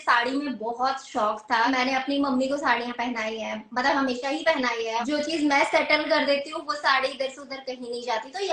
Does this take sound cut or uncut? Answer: cut